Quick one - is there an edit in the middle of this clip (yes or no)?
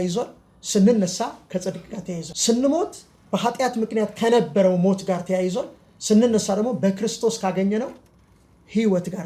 yes